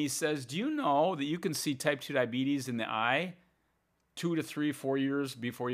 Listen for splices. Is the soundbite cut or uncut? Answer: uncut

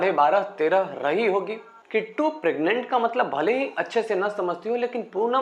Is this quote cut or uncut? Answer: uncut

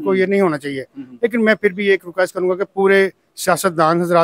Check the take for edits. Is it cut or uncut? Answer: uncut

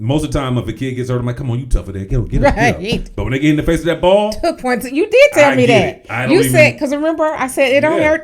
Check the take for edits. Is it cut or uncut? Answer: uncut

